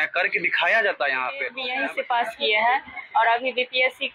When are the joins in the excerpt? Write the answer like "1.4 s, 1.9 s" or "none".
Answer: 1.6 s